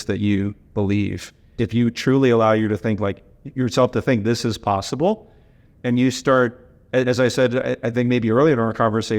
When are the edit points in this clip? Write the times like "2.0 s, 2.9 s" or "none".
1.5 s